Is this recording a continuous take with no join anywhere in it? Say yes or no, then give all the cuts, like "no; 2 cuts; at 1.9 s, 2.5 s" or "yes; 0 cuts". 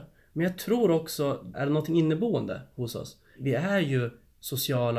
no; 2 cuts; at 1.5 s, 3.4 s